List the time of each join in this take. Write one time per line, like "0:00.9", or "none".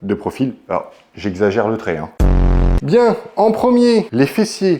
0:02.3